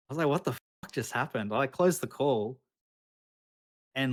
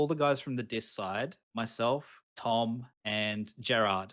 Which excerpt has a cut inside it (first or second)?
second